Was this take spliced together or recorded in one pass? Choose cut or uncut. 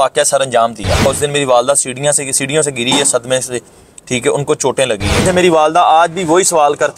cut